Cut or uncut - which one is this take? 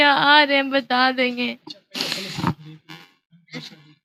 uncut